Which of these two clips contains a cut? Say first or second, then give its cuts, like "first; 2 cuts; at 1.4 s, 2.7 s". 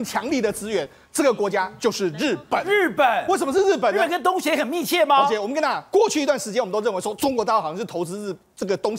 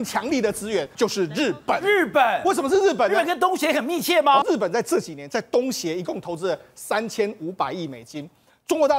second; 2 cuts; at 0.9 s, 4.4 s